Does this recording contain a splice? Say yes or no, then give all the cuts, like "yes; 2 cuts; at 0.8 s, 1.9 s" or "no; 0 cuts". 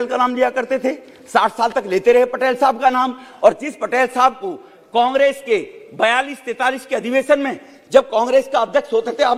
no; 0 cuts